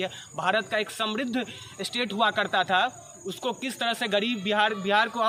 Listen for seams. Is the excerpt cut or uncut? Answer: uncut